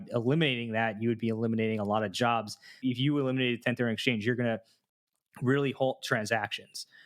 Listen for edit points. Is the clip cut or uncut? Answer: cut